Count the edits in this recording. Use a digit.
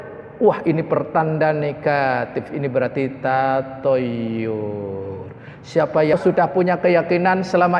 1